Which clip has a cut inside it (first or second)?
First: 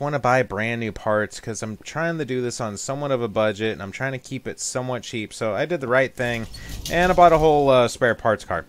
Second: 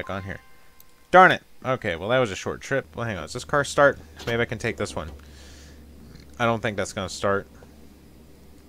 second